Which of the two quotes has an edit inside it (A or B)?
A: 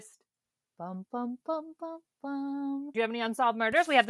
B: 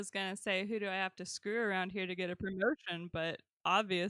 A